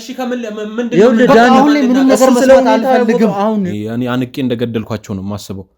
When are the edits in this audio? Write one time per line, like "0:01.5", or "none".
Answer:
0:03.7